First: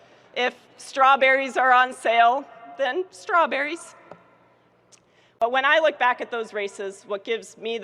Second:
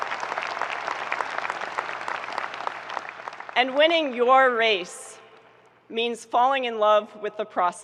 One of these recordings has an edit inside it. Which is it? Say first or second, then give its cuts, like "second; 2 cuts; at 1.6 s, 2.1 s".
first; 1 cut; at 5.4 s